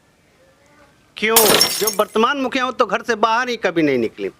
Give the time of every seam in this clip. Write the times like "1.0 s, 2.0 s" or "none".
1.8 s